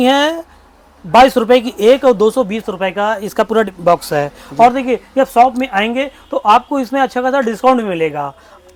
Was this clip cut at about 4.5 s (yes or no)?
no